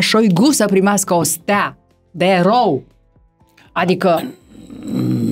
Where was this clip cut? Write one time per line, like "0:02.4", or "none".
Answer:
none